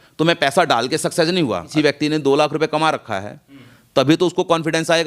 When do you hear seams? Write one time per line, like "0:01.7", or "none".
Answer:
0:01.7

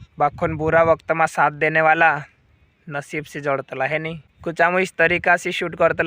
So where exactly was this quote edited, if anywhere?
0:04.3

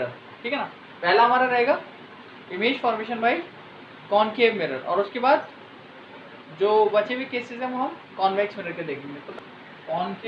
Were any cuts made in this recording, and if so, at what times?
0:09.2

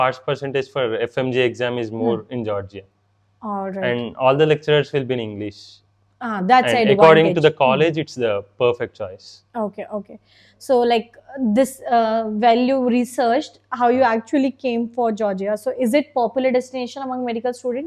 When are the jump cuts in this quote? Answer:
none

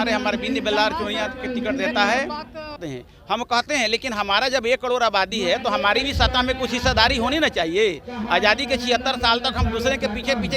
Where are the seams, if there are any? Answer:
0:02.8

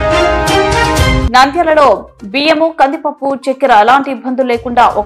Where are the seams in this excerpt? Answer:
0:01.2

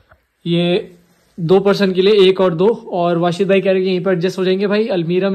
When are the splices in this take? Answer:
none

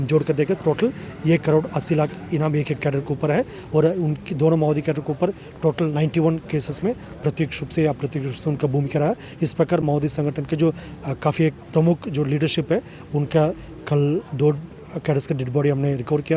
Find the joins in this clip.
none

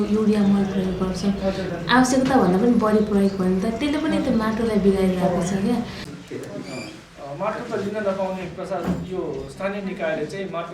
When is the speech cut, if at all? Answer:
0:05.9

